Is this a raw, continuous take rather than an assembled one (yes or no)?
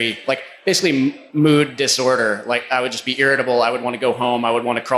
no